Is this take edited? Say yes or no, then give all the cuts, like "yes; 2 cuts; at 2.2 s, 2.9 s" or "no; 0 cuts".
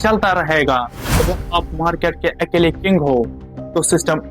yes; 1 cut; at 1.0 s